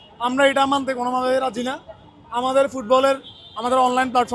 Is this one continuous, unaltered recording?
yes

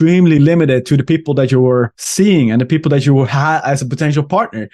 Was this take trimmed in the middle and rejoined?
yes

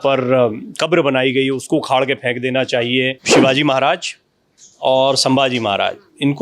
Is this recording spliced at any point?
yes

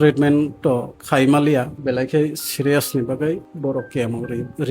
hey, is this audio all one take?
no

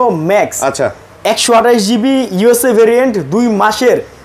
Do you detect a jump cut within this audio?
no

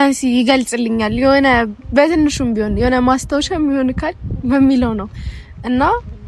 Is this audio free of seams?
yes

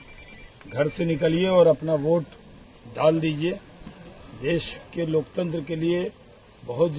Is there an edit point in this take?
no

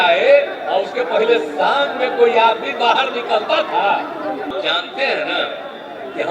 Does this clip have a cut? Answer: yes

